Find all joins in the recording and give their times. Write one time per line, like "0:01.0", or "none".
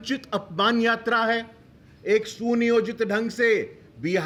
none